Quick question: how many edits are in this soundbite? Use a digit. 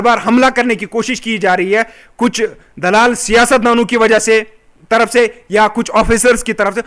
0